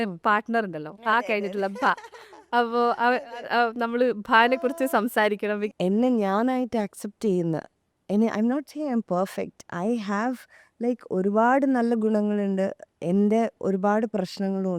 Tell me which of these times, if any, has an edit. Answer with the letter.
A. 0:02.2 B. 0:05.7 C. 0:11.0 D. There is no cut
B